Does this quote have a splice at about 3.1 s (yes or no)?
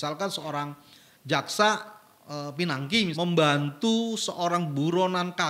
yes